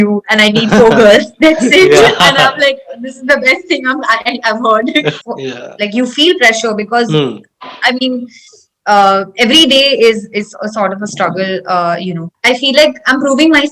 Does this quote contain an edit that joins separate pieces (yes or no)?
yes